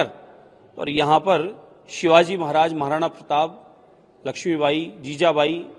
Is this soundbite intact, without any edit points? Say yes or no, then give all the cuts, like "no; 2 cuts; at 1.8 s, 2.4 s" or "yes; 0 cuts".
yes; 0 cuts